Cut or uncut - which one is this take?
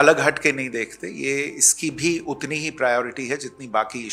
uncut